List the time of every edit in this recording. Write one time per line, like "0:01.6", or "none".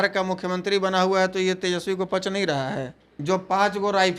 0:03.0